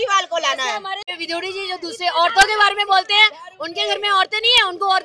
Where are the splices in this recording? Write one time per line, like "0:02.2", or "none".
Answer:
0:01.1